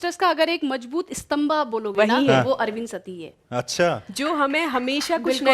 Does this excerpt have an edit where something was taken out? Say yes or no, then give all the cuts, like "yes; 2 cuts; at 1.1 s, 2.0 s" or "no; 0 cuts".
no; 0 cuts